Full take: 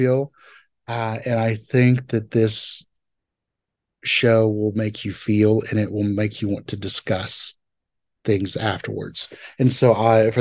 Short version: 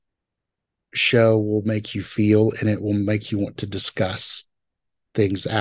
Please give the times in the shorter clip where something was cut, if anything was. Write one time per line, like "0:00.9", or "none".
none